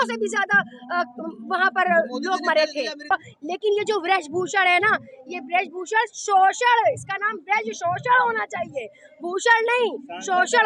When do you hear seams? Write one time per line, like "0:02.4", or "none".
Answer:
0:03.1